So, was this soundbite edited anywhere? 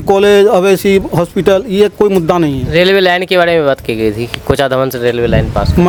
no; 0 cuts

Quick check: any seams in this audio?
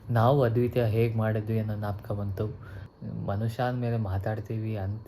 yes; 1 cut; at 2.8 s

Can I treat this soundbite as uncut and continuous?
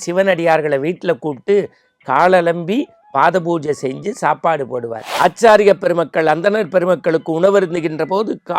no; 1 cut; at 5.0 s

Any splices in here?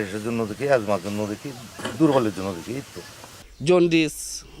yes; 1 cut; at 3.3 s

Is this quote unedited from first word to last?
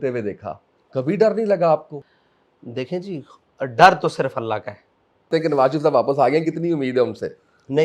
no; 2 cuts; at 2.0 s, 5.3 s

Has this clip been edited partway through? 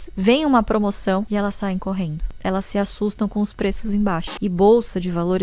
yes; 3 cuts; at 1.3 s, 2.2 s, 4.3 s

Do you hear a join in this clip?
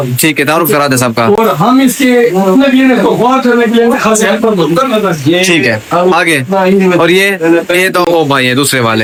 no; 0 cuts

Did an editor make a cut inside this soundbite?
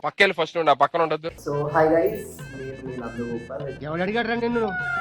yes; 1 cut; at 1.3 s

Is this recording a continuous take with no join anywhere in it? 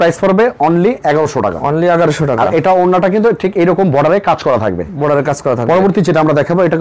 yes; 0 cuts

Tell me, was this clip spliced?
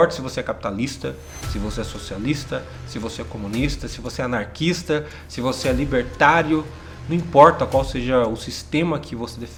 no; 0 cuts

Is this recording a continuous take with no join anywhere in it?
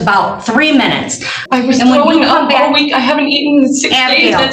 no; 1 cut; at 1.4 s

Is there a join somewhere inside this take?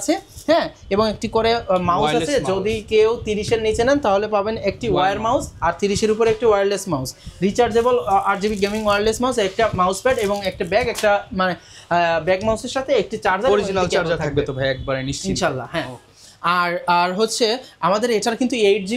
no; 0 cuts

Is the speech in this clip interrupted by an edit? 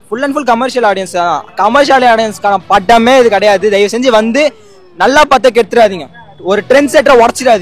no; 0 cuts

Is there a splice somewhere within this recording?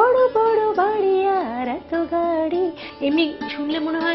yes; 1 cut; at 2.9 s

